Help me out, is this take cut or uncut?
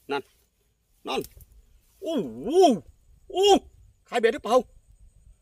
uncut